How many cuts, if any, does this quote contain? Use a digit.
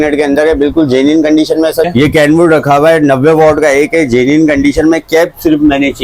1